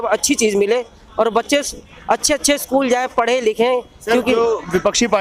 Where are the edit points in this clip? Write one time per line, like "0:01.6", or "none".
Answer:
none